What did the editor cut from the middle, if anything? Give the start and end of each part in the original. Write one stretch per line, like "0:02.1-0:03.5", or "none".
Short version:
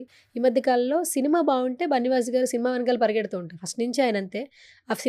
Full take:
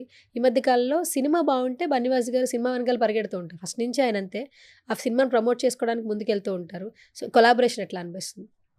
none